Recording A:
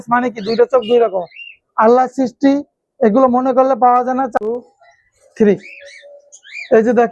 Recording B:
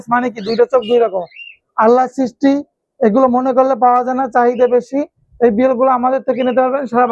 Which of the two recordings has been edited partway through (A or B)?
A